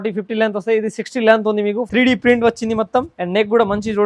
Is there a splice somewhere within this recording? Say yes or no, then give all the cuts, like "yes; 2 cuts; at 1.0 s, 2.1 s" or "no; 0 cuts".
yes; 2 cuts; at 1.8 s, 3.2 s